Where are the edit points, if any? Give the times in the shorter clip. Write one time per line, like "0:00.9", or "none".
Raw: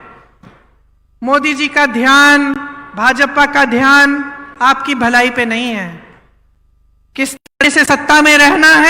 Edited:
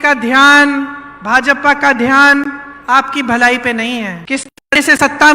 0:04.2